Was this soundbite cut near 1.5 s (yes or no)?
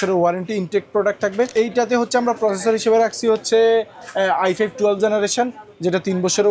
yes